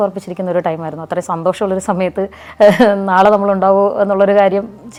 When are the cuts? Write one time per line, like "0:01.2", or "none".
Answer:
none